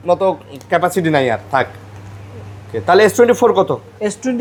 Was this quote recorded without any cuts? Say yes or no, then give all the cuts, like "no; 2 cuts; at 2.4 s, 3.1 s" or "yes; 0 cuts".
yes; 0 cuts